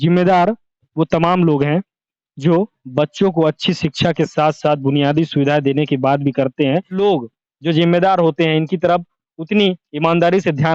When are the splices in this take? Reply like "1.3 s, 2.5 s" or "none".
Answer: 6.9 s